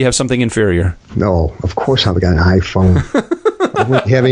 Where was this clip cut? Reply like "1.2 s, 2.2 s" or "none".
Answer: 1.0 s